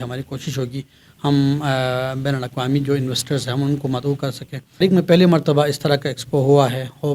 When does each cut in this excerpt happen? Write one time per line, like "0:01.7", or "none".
0:04.6